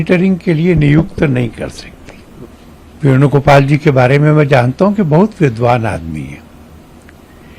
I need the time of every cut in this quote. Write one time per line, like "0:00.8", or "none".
0:02.5